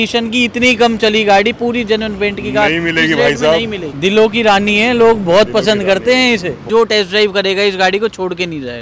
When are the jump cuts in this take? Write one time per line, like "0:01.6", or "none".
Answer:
0:03.8
0:06.6